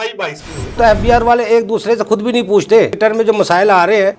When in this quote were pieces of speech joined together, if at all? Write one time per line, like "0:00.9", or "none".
0:00.8
0:02.9